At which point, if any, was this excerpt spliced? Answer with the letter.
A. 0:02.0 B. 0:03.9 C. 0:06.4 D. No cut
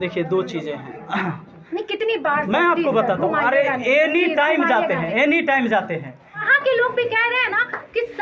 C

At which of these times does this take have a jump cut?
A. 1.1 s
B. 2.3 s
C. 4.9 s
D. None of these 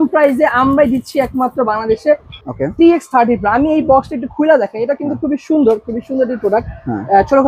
B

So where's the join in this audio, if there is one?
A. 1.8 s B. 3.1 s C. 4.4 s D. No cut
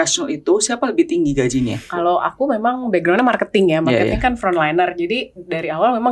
A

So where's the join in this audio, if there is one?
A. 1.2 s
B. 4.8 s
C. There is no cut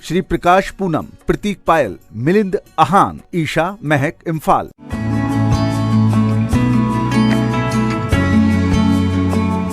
B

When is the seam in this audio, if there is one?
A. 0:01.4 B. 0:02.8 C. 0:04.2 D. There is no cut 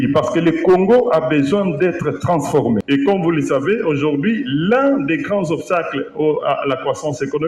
B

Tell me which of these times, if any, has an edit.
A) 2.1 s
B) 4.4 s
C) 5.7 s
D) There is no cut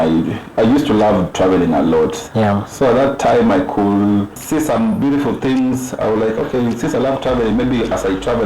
B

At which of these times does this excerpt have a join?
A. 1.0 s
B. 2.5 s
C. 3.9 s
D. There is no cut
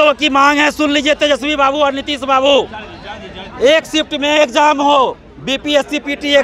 D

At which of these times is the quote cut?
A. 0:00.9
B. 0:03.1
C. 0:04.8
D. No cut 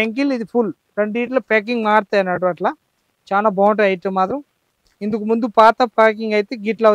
D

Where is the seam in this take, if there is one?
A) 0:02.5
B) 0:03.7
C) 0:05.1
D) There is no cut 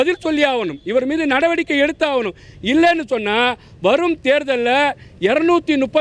D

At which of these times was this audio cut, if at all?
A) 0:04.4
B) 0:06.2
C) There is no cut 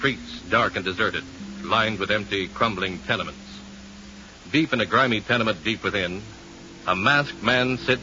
C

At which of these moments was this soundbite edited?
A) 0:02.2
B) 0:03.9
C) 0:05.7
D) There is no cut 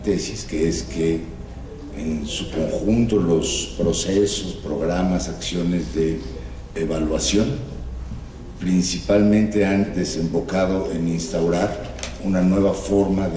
C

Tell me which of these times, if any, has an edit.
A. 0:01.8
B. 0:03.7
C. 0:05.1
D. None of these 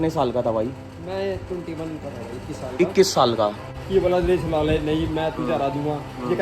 B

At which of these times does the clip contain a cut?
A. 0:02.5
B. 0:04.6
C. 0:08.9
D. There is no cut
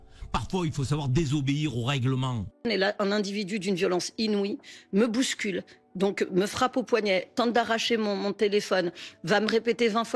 A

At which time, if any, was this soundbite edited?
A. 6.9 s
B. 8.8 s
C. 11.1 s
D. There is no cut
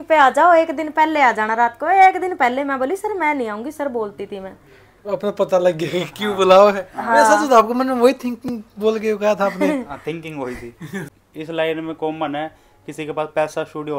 C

